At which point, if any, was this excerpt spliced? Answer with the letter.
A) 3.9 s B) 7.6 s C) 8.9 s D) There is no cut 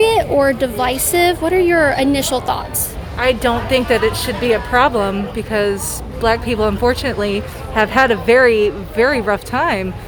D